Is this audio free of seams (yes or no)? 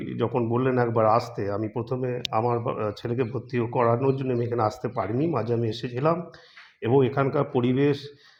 yes